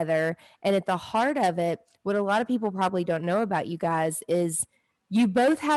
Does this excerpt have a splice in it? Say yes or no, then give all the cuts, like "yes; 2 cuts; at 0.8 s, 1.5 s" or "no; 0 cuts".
no; 0 cuts